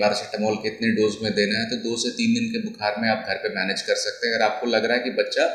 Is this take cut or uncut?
uncut